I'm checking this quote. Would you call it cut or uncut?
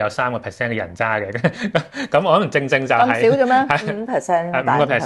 uncut